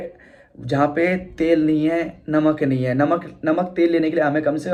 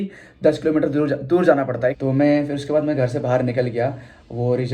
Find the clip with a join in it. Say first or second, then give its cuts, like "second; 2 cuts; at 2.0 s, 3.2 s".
second; 1 cut; at 2.0 s